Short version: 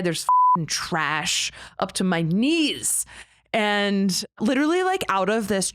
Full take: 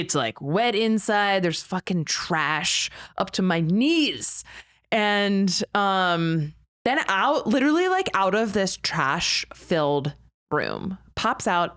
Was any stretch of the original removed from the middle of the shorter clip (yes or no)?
yes